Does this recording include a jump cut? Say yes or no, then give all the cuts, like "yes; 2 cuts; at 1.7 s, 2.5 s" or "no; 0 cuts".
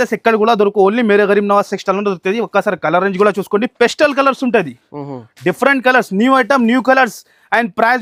no; 0 cuts